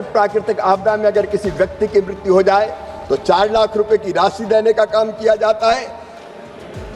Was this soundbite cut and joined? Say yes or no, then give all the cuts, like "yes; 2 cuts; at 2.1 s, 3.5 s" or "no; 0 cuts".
no; 0 cuts